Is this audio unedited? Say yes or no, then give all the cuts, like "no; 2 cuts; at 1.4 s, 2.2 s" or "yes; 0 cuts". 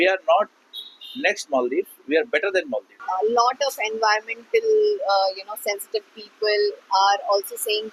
no; 1 cut; at 2.9 s